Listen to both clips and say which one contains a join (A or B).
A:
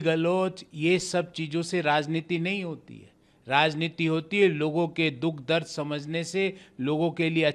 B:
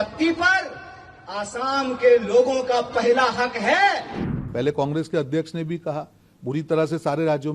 B